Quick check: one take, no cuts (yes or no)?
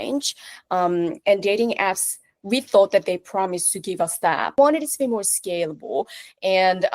no